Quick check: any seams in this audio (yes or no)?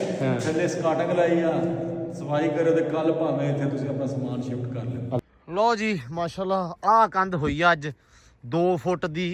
yes